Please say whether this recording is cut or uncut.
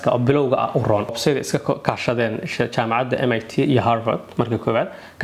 cut